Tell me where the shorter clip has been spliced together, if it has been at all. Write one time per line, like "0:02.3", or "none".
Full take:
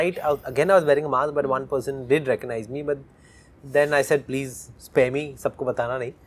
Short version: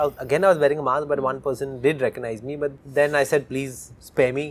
0:02.8